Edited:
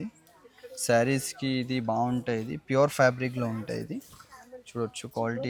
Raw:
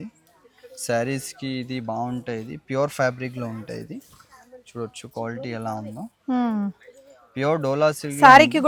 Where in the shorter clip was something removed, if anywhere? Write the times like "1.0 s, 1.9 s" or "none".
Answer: none